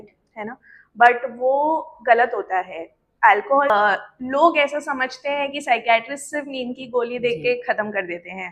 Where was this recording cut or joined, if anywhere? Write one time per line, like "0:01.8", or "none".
0:03.7